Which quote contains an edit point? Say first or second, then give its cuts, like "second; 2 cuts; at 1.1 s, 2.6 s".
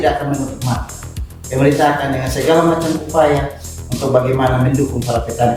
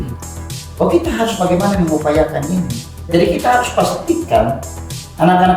second; 1 cut; at 2.9 s